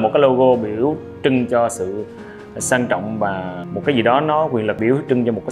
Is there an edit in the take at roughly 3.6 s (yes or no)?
yes